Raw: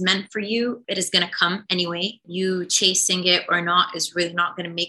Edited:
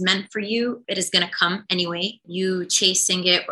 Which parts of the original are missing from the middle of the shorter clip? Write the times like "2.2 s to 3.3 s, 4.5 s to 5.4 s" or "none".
none